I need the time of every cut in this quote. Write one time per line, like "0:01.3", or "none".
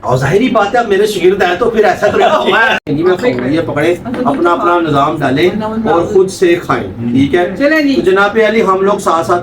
0:02.8